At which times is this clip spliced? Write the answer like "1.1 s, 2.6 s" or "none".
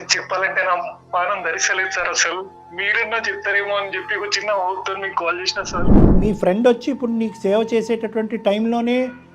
6.2 s